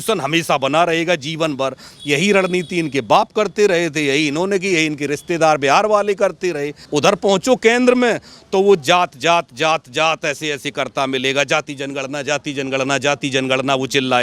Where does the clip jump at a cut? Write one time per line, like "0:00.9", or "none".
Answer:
0:06.8